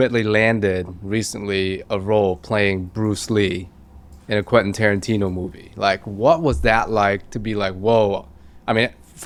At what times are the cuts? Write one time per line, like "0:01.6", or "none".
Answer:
none